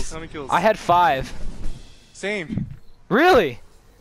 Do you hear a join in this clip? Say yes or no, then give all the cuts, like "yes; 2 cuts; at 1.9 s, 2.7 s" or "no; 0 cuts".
no; 0 cuts